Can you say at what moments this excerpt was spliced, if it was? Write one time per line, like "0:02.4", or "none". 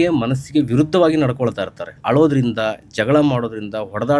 0:01.9